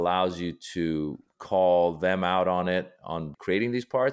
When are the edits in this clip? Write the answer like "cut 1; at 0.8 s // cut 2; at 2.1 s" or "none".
cut 1; at 1.3 s // cut 2; at 3.3 s